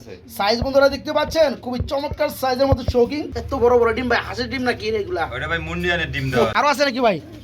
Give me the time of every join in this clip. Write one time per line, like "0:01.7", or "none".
0:03.6
0:06.5